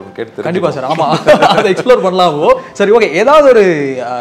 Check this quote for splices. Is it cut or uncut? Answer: uncut